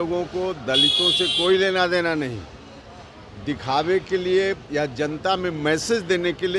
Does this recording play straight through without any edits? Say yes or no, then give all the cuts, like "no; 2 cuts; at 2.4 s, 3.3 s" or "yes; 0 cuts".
yes; 0 cuts